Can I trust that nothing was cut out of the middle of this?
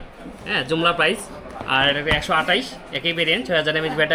yes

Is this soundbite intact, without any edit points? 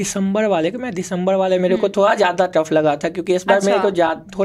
yes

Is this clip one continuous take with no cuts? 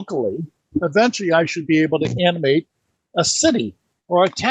yes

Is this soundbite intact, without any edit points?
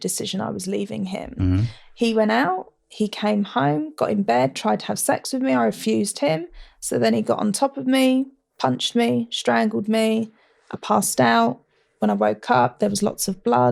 yes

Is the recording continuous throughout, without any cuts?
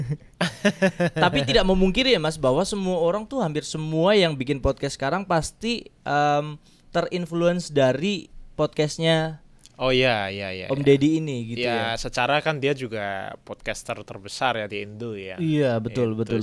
yes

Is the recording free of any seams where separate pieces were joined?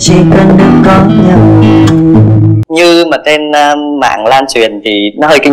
no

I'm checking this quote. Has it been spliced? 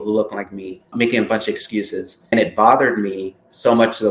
yes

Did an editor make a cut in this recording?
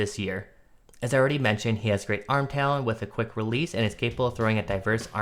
no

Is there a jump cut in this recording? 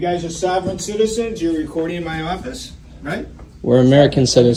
no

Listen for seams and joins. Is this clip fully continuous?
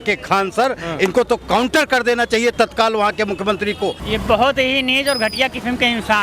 no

